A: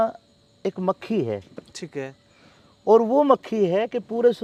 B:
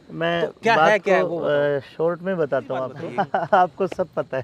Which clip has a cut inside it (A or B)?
B